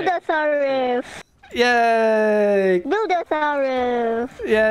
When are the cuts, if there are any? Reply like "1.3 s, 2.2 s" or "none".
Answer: 2.8 s